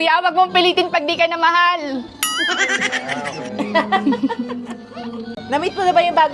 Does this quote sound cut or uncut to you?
uncut